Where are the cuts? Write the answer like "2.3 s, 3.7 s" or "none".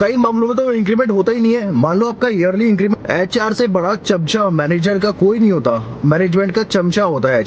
2.9 s